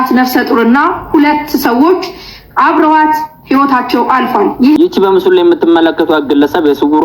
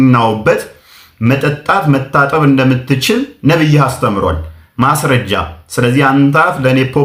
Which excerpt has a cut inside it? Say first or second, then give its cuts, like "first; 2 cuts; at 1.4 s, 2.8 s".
first; 1 cut; at 4.8 s